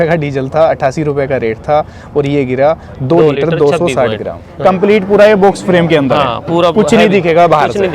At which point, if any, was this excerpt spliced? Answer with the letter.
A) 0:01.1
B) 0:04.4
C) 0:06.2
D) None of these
B